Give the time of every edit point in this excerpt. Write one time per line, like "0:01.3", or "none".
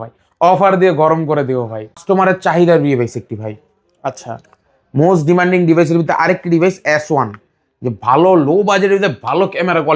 0:02.0

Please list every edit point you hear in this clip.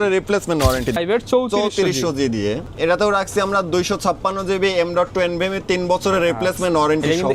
0:01.0
0:02.7

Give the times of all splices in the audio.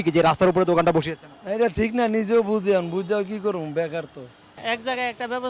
0:04.5

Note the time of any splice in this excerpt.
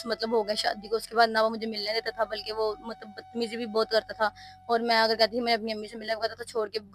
none

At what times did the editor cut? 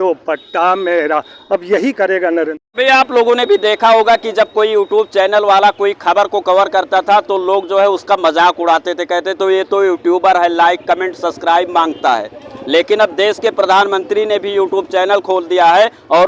0:02.6

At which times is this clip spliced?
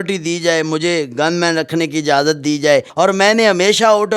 0:02.9

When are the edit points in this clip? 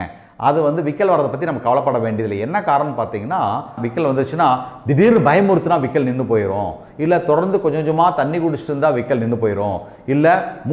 0:03.8

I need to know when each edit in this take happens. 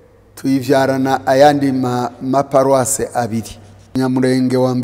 0:03.9

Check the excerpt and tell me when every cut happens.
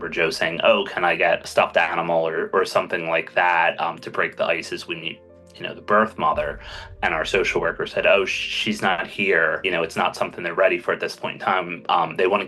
0:01.5

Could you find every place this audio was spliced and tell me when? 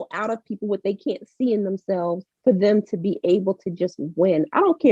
none

